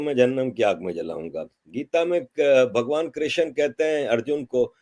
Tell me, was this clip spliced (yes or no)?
no